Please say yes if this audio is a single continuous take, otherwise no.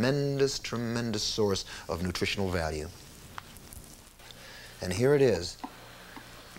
no